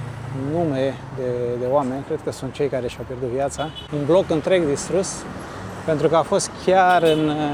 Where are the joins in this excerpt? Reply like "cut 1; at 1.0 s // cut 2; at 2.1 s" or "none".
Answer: none